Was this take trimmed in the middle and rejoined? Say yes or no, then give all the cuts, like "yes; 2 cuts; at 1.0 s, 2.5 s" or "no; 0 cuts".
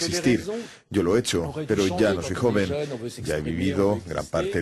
yes; 1 cut; at 1.5 s